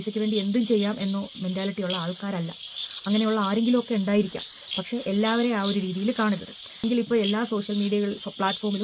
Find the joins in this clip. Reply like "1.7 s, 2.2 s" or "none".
6.8 s